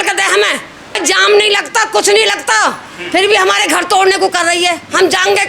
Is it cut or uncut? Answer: cut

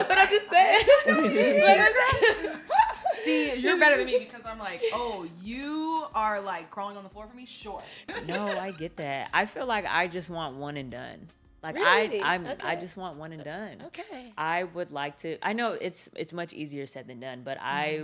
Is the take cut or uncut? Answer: cut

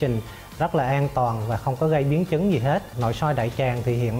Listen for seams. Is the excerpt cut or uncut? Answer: uncut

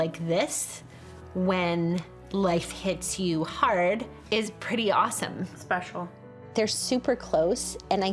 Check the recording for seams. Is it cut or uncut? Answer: cut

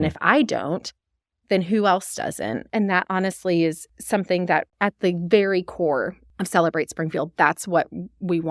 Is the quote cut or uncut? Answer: cut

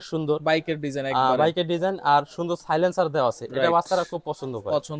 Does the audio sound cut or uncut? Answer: uncut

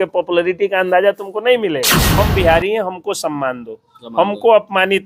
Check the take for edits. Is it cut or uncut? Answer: cut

